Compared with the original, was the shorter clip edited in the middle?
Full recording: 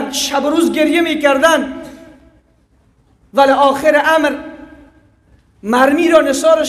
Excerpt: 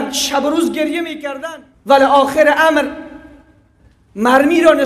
yes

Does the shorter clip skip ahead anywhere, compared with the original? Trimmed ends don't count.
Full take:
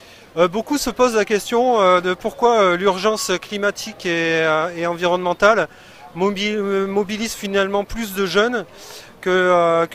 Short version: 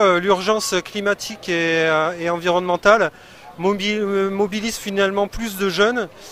no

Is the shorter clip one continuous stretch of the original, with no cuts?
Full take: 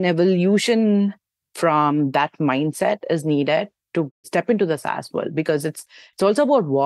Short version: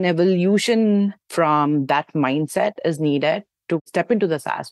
no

